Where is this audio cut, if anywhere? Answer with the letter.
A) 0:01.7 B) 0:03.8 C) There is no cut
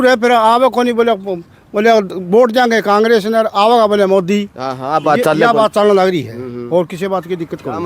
C